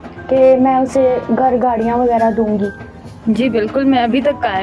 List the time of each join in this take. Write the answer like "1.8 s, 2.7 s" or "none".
none